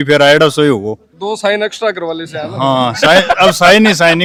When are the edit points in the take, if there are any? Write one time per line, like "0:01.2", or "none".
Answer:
none

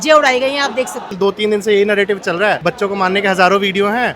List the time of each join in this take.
0:01.1
0:02.6

